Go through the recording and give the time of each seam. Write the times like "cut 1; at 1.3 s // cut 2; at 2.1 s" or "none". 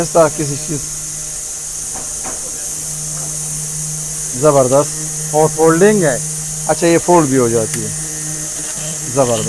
none